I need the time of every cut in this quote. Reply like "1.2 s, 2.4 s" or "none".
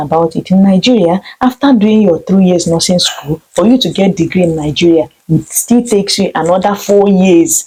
none